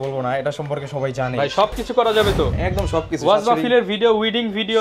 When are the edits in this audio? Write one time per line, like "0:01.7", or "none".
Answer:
none